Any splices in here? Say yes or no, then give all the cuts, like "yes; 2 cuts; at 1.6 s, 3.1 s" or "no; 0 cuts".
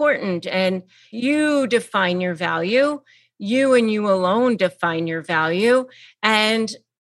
yes; 1 cut; at 1.0 s